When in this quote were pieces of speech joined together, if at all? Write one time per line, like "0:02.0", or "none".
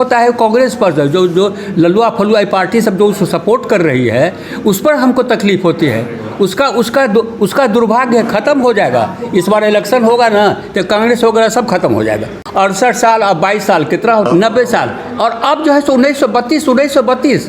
0:12.3
0:14.3